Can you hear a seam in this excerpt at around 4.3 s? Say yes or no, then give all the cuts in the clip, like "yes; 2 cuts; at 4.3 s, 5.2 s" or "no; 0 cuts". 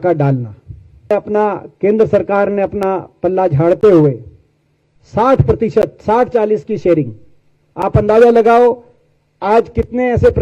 no; 1 cut; at 1.1 s